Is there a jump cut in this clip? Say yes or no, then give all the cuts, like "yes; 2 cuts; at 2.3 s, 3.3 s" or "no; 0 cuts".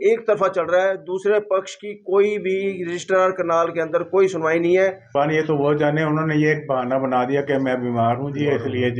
yes; 1 cut; at 5.1 s